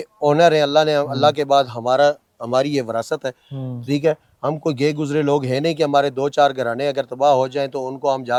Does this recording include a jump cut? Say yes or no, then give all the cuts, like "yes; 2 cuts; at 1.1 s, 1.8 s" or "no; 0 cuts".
no; 0 cuts